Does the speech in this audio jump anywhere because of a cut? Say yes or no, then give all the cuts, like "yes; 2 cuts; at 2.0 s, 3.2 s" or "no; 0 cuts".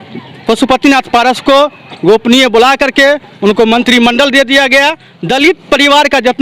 yes; 1 cut; at 5.1 s